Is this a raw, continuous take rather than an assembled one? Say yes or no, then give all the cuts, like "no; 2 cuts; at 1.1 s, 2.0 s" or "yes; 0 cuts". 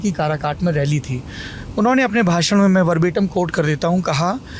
yes; 0 cuts